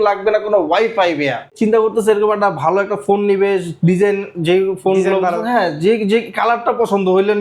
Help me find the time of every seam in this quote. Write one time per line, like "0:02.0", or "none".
0:01.5